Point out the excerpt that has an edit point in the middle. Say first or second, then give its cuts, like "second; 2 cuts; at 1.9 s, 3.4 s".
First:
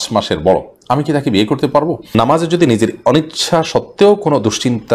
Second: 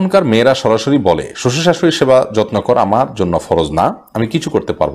first; 1 cut; at 2.1 s